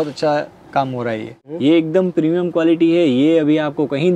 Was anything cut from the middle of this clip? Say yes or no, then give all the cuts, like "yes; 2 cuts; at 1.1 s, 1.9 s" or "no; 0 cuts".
yes; 1 cut; at 1.4 s